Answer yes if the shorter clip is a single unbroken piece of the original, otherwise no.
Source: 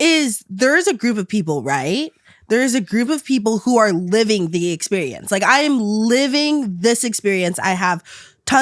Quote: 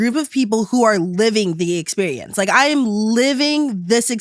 yes